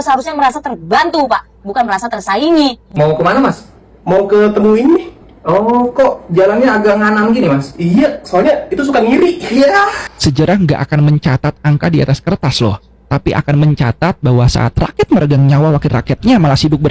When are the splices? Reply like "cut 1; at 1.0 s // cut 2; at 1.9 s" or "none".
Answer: cut 1; at 2.8 s // cut 2; at 10.1 s